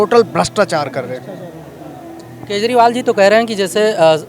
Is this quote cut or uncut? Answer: uncut